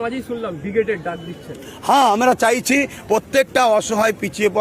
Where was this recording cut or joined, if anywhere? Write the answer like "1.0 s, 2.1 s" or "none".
none